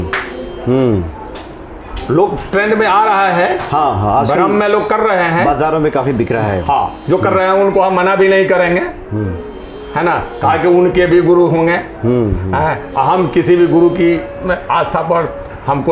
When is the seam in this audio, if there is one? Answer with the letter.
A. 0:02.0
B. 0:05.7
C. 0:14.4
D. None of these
D